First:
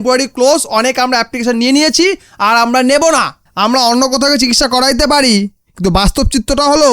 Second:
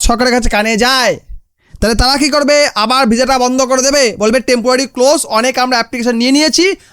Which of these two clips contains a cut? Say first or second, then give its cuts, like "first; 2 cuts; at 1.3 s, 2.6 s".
first; 1 cut; at 3.4 s